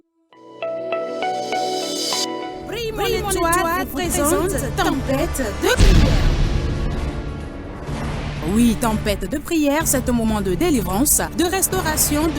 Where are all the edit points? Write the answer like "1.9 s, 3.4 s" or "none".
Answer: 2.6 s